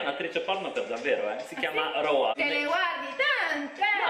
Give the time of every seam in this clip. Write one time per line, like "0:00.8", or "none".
0:02.3